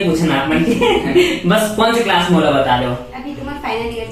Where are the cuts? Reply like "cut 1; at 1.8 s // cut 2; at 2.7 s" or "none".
none